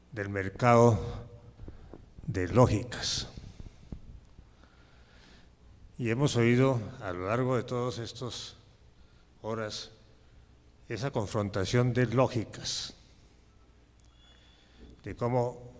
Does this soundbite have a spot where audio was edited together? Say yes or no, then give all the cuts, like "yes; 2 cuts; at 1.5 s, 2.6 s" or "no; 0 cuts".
yes; 1 cut; at 4.2 s